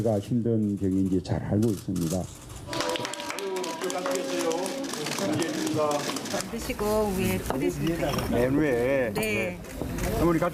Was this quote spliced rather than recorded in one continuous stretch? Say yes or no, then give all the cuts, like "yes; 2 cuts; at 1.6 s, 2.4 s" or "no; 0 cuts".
no; 0 cuts